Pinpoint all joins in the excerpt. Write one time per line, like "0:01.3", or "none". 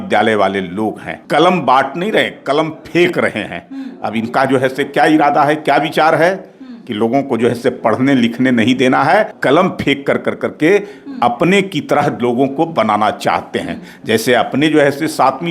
0:01.1
0:09.3